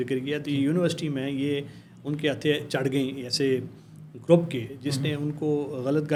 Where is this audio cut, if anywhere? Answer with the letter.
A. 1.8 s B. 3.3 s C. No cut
C